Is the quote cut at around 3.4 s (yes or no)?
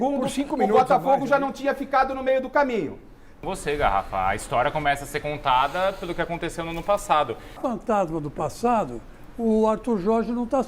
yes